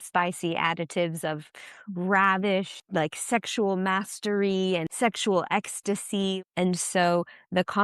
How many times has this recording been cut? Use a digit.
3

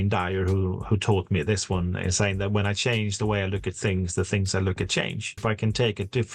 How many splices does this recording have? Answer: 1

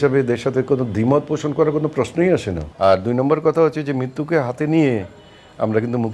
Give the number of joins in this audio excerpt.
1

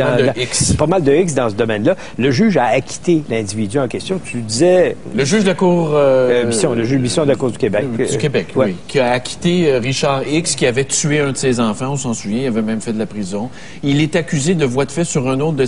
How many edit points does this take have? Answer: 0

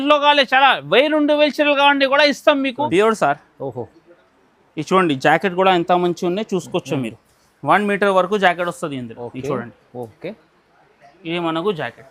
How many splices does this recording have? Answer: 1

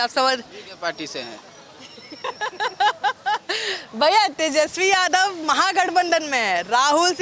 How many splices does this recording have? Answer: 0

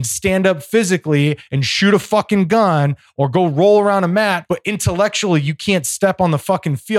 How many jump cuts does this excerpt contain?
1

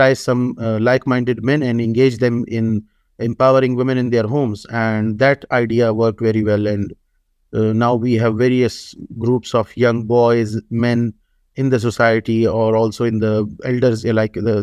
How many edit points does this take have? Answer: 0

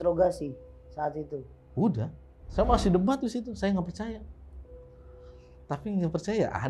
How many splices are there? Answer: 1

